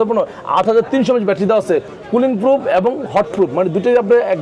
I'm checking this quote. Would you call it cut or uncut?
uncut